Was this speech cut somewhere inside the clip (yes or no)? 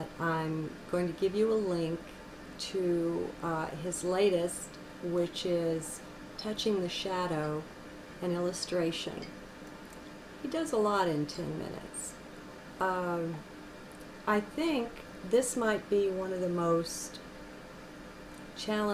yes